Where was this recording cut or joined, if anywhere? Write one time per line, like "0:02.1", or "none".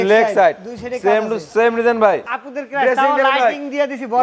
0:02.4